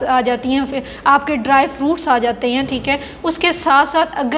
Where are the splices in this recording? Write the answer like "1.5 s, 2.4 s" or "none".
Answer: none